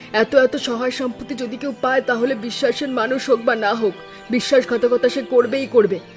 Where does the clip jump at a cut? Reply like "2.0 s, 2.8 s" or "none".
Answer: none

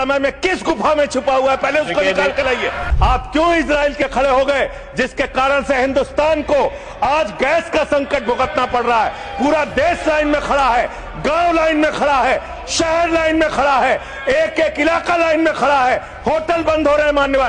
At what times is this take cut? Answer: 2.8 s

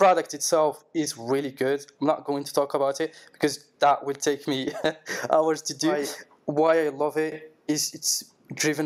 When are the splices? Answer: 6.0 s

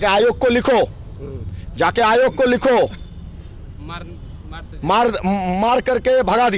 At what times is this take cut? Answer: none

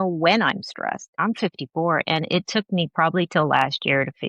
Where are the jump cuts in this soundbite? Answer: 1.1 s

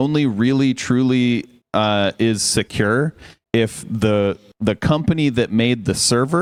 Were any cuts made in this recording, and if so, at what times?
none

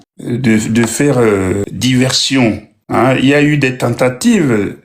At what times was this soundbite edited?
1.7 s

